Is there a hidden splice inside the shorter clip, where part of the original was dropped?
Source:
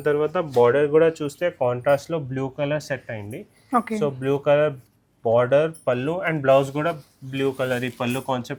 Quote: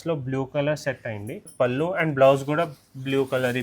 yes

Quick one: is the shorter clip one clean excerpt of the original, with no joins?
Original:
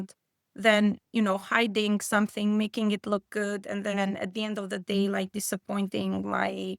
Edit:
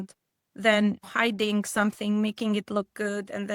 no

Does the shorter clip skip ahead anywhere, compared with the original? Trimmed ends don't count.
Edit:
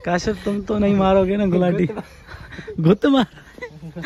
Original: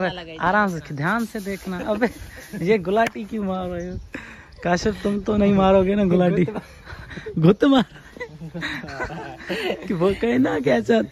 no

